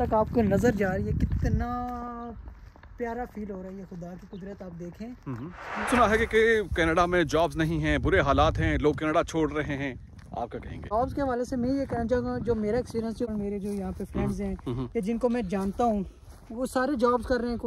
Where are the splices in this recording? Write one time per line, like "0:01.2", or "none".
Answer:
0:05.9
0:10.9
0:13.3